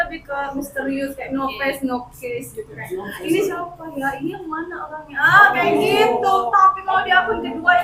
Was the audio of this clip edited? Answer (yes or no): no